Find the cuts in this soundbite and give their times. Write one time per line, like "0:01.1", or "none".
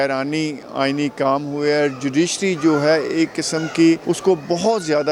0:04.0